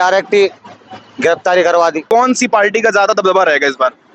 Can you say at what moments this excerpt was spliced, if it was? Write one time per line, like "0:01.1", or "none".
0:02.0